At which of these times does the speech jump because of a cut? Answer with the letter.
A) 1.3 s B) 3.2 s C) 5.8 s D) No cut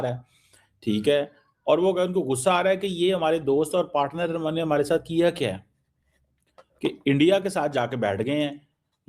D